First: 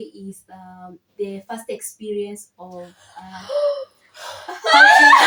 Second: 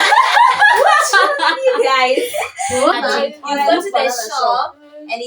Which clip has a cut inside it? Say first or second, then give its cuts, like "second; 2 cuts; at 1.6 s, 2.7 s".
second; 1 cut; at 2.9 s